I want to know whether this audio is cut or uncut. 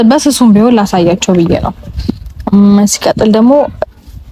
uncut